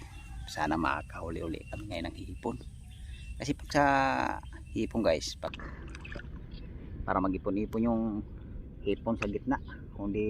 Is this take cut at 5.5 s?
yes; 1 cut; at 5.5 s

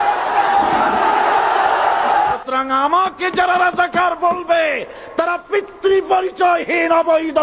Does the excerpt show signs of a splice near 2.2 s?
yes; 1 cut; at 2.2 s

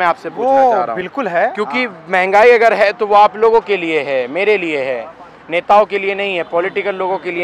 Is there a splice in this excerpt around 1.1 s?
no; 0 cuts

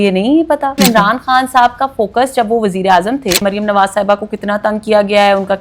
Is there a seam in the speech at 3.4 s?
yes; 2 cuts; at 0.8 s, 3.4 s

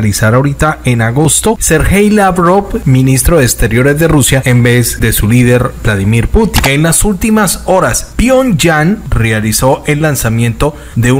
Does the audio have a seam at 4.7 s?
yes; 6 cuts; at 1.6 s, 2.8 s, 4.7 s, 6.5 s, 8.0 s, 9.1 s

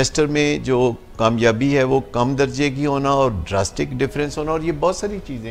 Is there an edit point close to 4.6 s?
no; 0 cuts

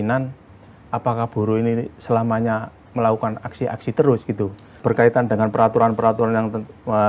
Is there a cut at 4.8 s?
yes; 1 cut; at 4.8 s

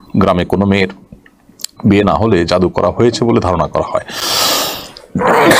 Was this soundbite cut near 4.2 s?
no; 0 cuts

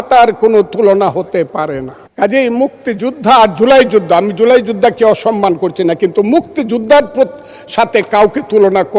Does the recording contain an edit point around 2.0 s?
yes; 1 cut; at 2.0 s

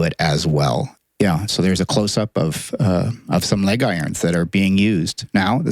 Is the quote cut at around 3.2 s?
no; 1 cut; at 0.9 s

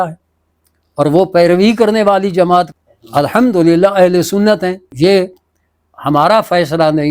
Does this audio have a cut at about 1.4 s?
no; 2 cuts; at 2.7 s, 4.9 s

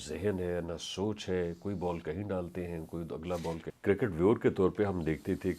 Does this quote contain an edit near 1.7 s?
no; 1 cut; at 3.7 s

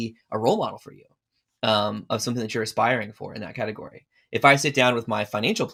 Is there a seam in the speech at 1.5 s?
no; 0 cuts

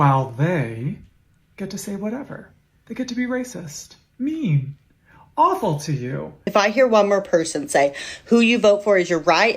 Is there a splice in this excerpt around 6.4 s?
yes; 1 cut; at 6.4 s

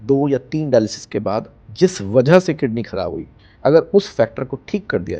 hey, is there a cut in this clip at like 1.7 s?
no; 0 cuts

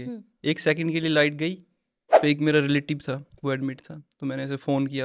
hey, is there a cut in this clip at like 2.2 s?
yes; 1 cut; at 2.2 s

